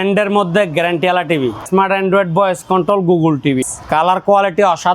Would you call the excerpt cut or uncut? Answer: cut